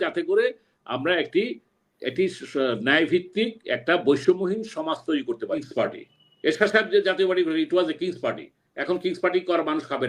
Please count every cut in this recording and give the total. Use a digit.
1